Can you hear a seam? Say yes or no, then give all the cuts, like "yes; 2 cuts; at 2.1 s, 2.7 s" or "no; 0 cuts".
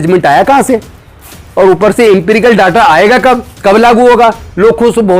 no; 0 cuts